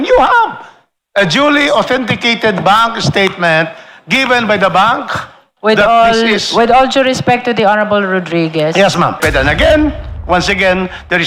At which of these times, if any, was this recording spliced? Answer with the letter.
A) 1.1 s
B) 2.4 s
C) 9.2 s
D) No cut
C